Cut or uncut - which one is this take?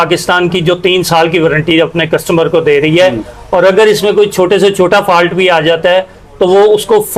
uncut